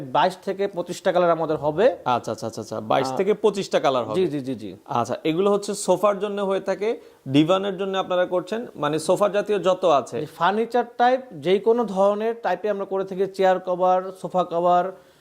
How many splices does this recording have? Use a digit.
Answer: 0